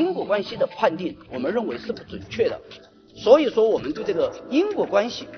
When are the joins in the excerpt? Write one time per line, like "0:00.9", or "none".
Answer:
none